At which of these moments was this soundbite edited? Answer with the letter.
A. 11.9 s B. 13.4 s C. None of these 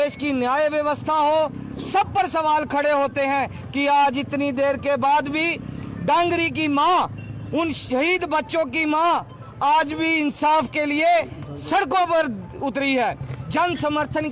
C